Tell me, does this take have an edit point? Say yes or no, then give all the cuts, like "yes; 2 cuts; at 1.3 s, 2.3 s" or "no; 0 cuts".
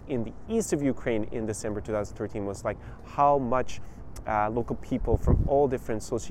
no; 0 cuts